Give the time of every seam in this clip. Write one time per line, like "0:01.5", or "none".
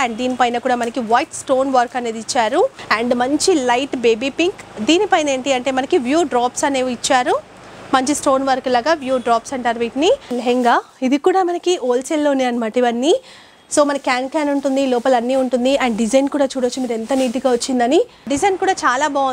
0:02.8
0:10.4
0:18.3